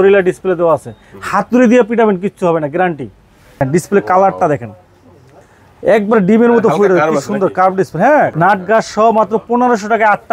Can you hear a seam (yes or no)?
yes